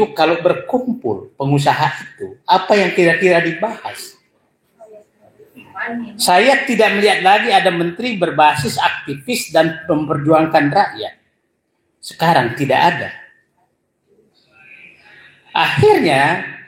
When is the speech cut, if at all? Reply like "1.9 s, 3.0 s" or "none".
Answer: none